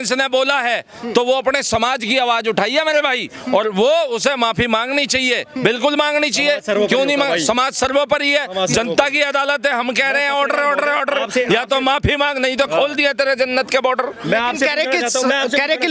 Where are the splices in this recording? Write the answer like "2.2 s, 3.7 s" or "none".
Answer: none